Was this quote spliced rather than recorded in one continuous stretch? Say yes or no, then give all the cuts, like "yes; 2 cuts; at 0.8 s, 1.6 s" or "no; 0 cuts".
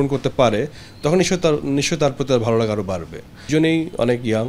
yes; 1 cut; at 3.5 s